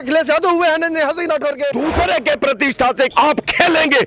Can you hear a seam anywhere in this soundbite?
yes; 1 cut; at 1.7 s

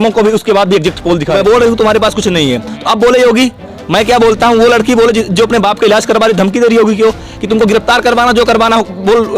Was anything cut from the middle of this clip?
yes; 1 cut; at 1.4 s

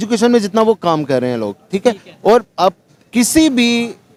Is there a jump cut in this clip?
no; 0 cuts

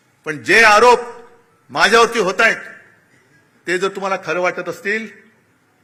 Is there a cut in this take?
no; 0 cuts

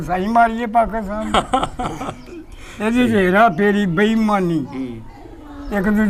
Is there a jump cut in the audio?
no; 0 cuts

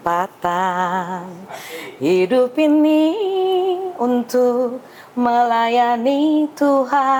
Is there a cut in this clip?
no; 0 cuts

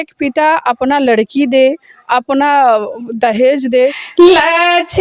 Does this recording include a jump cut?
yes; 1 cut; at 4.0 s

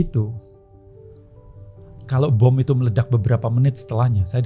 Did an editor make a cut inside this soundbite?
no; 0 cuts

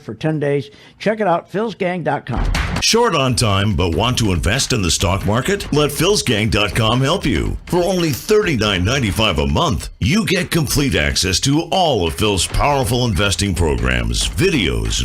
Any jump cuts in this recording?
yes; 1 cut; at 2.5 s

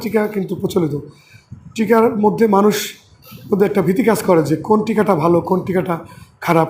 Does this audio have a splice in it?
no; 0 cuts

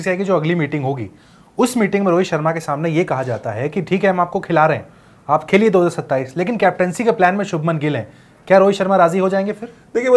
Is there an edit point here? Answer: no; 0 cuts

